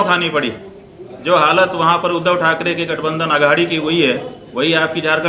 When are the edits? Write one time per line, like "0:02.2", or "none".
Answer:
none